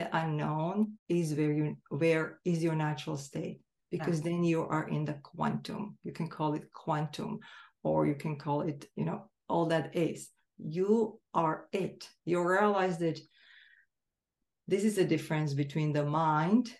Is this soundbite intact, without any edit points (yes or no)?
no